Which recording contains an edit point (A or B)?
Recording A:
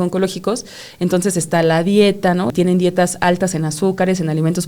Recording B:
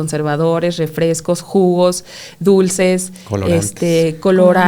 A